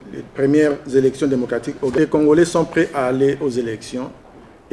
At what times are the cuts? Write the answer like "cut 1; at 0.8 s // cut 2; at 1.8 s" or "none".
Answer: cut 1; at 1.9 s